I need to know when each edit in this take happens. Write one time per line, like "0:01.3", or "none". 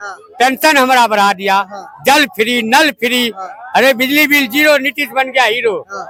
none